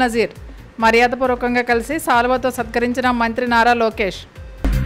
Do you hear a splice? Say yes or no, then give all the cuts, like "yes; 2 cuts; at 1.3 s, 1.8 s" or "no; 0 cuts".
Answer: no; 0 cuts